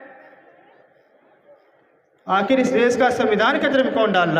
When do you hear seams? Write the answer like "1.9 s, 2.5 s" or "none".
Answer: none